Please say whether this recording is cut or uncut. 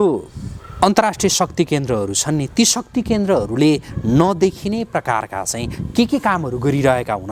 uncut